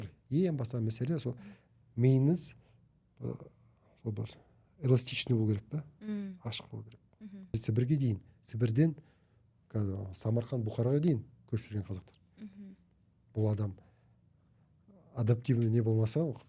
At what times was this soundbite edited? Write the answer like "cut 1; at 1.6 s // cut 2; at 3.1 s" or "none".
cut 1; at 7.5 s